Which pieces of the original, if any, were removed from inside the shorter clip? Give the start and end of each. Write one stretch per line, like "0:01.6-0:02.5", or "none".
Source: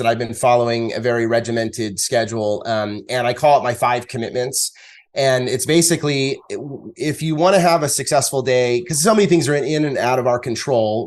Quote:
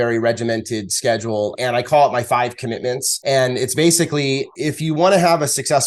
0:02.6-0:03.1
0:04.6-0:05.0
0:06.4-0:06.9